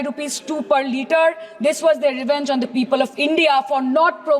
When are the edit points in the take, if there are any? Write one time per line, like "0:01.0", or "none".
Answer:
none